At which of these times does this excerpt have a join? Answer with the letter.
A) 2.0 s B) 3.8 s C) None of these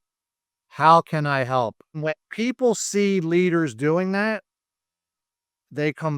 A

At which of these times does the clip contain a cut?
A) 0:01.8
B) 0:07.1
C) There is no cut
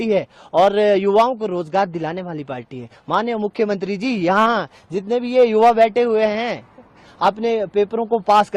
C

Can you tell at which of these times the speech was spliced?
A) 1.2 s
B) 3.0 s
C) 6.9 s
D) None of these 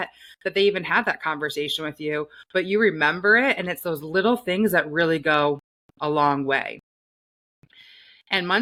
D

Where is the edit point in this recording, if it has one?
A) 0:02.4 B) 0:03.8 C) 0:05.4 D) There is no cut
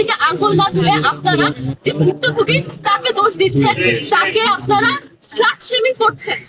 D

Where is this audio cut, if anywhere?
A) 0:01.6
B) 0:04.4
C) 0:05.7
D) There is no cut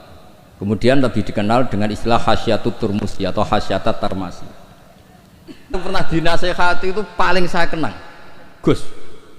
C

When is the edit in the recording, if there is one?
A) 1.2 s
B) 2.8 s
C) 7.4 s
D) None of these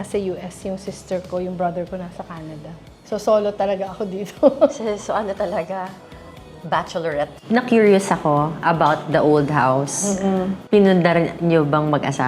C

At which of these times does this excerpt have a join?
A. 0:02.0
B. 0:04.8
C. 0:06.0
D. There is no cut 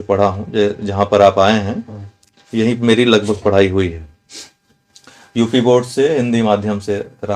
D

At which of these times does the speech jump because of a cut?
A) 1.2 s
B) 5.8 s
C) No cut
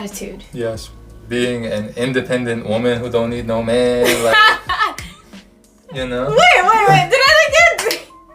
A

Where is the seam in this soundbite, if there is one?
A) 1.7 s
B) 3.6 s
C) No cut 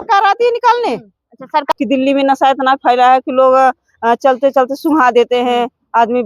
A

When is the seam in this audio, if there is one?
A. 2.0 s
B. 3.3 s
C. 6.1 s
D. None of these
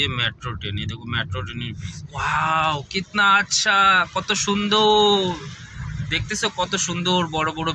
A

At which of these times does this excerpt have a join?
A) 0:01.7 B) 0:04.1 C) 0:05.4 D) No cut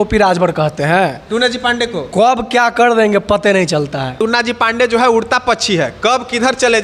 B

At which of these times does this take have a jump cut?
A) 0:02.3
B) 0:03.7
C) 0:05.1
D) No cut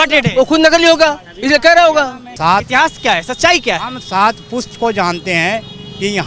A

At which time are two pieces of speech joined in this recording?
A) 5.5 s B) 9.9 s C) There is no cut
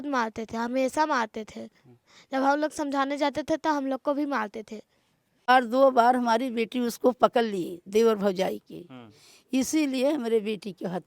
A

